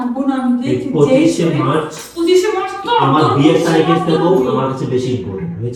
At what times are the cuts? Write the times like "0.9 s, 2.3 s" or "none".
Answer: none

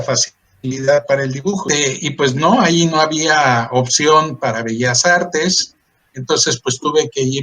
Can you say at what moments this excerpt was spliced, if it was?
1.6 s

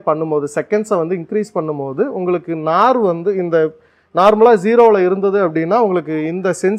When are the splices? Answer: none

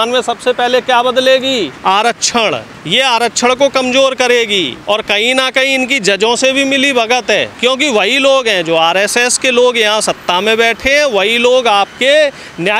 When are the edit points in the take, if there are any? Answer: 1.7 s, 2.7 s, 4.8 s, 7.5 s

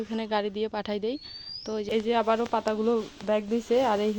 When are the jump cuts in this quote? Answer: 2.2 s

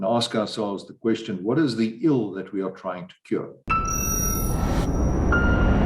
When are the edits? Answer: 3.6 s

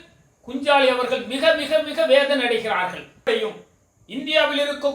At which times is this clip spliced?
3.3 s

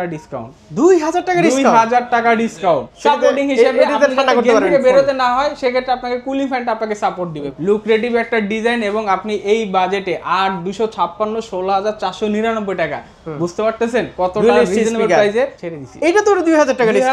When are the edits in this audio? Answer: 2.9 s, 7.5 s, 15.6 s

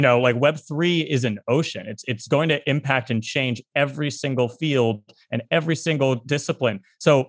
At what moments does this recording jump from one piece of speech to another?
none

